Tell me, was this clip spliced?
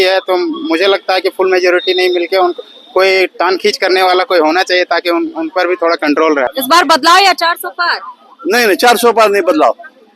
yes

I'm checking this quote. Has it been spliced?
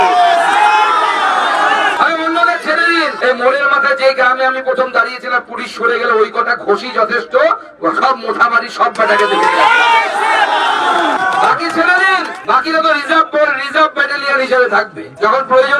no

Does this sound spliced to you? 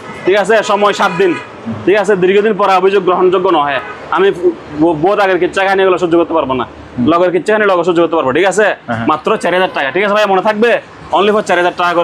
no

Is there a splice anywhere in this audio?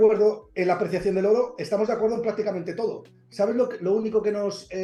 no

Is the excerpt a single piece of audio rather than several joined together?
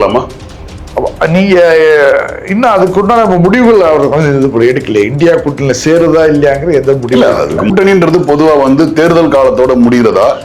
no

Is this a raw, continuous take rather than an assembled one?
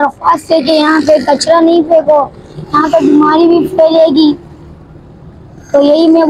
yes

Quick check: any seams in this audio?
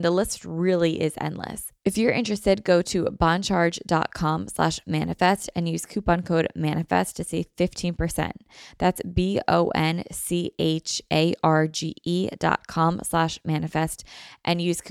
yes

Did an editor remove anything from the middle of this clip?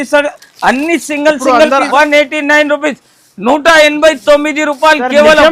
yes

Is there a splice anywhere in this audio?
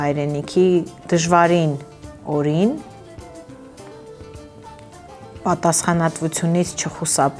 no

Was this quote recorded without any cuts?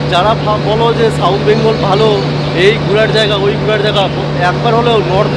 yes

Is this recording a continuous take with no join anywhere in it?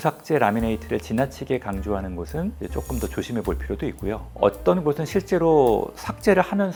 yes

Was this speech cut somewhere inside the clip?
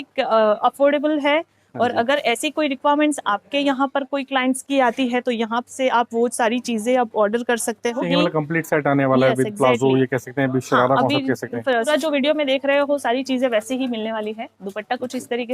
yes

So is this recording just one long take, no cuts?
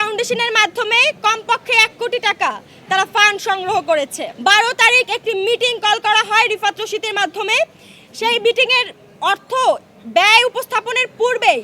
no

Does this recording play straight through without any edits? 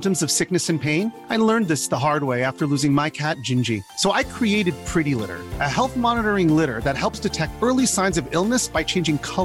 yes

